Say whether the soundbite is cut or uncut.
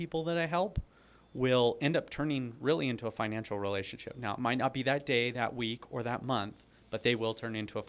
uncut